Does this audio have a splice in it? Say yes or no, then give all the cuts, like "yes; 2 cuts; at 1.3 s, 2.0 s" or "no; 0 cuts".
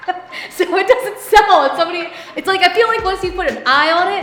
no; 0 cuts